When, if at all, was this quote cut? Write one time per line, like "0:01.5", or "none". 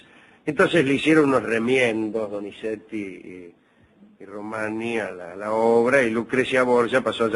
0:06.2